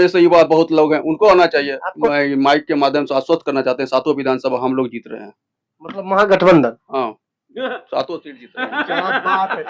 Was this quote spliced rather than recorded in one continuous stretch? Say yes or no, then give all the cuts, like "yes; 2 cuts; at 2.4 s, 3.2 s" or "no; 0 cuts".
yes; 1 cut; at 2.0 s